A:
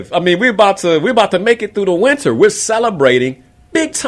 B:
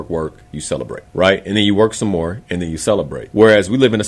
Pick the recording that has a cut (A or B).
B